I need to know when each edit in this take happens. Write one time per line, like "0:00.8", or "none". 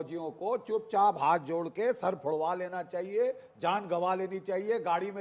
none